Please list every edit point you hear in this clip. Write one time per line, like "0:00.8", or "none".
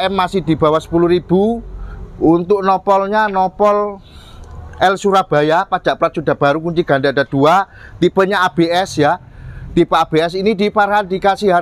none